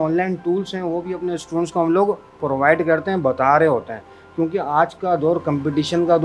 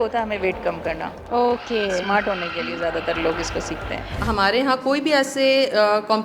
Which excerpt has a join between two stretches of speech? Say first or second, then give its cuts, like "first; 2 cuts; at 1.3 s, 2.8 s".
second; 1 cut; at 4.2 s